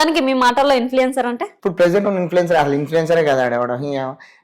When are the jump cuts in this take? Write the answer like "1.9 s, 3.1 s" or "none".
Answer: 1.5 s